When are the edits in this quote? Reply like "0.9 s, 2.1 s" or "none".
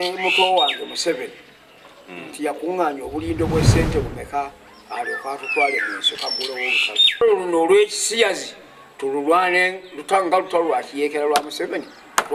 7.2 s